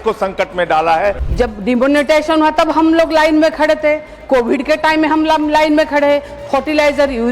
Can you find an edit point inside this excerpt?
yes; 1 cut; at 1.2 s

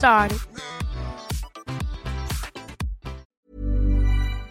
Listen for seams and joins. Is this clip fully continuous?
no; 1 cut; at 3.2 s

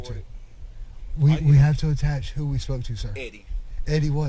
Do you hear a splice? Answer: yes; 1 cut; at 3.3 s

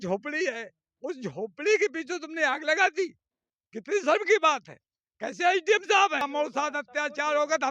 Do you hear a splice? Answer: yes; 1 cut; at 6.3 s

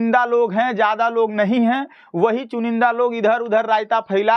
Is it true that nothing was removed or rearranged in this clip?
yes; 0 cuts

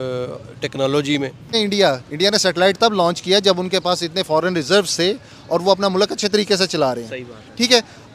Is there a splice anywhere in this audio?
yes; 1 cut; at 1.5 s

